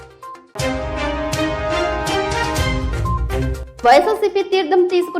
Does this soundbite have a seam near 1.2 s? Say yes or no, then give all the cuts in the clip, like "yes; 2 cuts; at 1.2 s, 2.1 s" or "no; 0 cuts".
no; 1 cut; at 3.6 s